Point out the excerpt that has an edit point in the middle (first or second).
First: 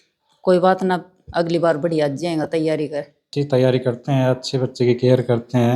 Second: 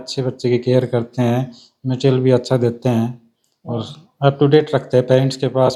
first